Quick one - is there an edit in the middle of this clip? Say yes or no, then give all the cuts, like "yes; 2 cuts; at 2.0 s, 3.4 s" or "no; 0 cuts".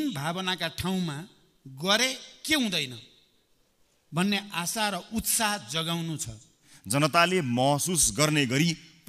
yes; 1 cut; at 6.7 s